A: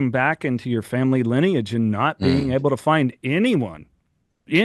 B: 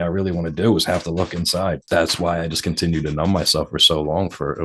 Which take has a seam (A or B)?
B